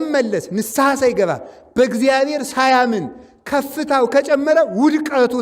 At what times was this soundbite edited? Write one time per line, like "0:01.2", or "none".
none